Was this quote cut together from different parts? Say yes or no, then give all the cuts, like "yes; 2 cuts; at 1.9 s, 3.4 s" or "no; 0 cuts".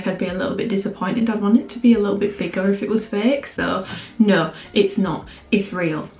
no; 0 cuts